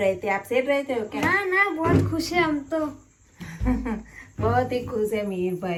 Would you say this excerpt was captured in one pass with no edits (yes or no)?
yes